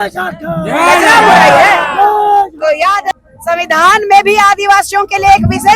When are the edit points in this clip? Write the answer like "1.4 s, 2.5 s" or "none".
3.0 s

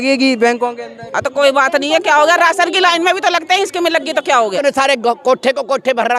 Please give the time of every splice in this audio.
4.6 s

